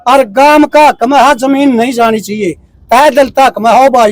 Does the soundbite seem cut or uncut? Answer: uncut